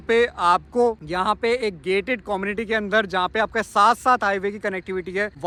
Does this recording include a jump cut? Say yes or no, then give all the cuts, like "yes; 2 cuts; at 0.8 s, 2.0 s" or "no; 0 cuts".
no; 0 cuts